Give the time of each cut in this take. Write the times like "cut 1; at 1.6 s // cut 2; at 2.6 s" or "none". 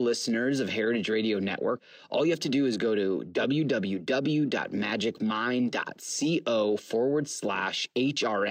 cut 1; at 1.8 s

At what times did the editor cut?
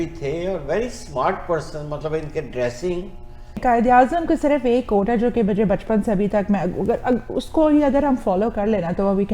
cut 1; at 3.6 s

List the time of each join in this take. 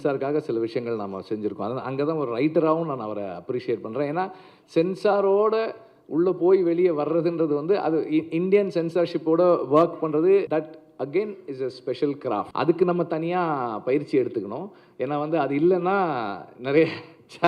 cut 1; at 10.5 s // cut 2; at 12.5 s

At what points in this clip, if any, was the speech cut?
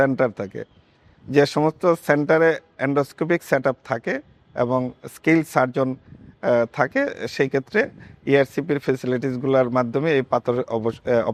none

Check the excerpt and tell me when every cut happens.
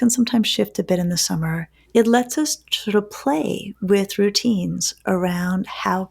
cut 1; at 1.7 s

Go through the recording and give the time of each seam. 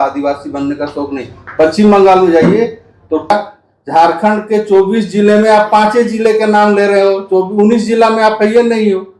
cut 1; at 3.3 s

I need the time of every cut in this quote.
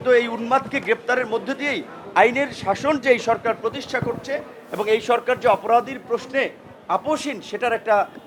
none

